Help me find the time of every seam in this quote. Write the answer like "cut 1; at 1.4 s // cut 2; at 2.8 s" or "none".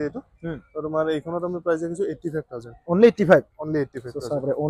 none